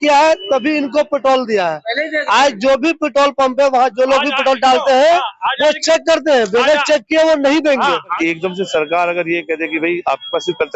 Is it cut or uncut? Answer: cut